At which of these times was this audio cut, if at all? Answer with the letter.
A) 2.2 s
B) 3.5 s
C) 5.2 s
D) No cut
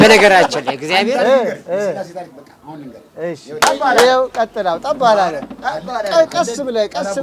B